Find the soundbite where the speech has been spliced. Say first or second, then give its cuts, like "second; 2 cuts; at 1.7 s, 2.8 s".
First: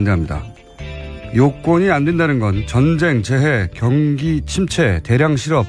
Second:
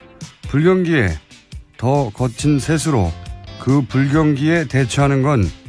second; 1 cut; at 3.5 s